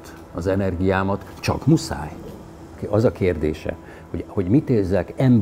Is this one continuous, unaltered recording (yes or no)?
no